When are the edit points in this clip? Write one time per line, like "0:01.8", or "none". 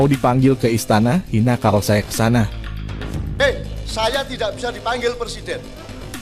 0:03.1